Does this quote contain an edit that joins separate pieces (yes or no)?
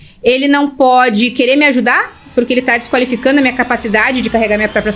no